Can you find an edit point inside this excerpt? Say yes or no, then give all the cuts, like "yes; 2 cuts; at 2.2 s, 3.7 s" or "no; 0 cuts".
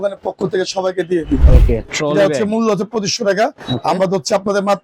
yes; 1 cut; at 1.4 s